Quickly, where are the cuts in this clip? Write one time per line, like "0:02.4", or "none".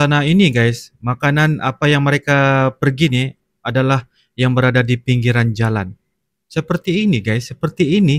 none